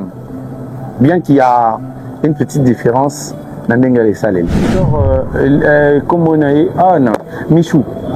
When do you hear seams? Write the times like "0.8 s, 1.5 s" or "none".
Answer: 4.7 s